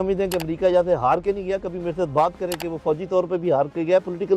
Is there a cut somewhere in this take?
no; 0 cuts

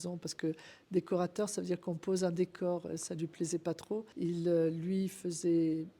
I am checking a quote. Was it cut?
yes; 1 cut; at 4.1 s

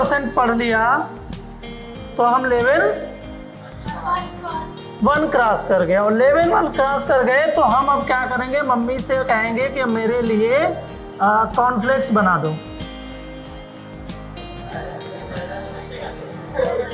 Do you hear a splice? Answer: no; 0 cuts

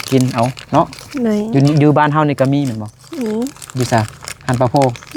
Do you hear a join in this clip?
no; 0 cuts

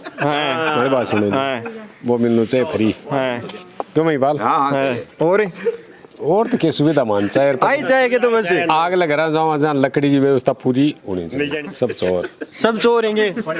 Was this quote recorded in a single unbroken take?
no; 1 cut; at 11.6 s

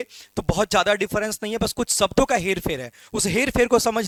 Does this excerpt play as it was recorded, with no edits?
yes; 0 cuts

